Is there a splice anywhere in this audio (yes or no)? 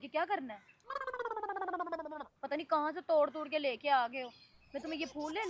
no